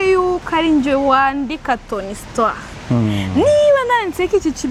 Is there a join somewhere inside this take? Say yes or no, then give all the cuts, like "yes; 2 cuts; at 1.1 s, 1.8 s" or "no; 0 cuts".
no; 0 cuts